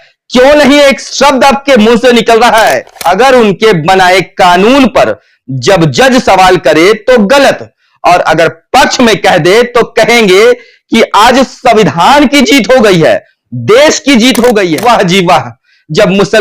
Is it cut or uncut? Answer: cut